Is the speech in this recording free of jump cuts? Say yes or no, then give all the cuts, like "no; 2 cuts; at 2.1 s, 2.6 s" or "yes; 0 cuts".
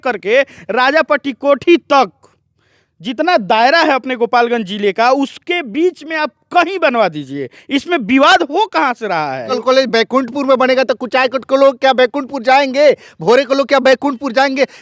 no; 1 cut; at 9.5 s